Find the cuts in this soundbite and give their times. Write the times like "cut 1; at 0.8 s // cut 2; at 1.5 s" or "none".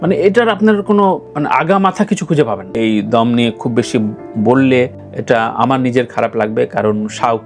cut 1; at 2.7 s